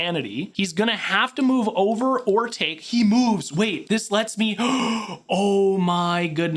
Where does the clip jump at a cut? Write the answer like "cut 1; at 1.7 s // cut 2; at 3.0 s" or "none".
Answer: none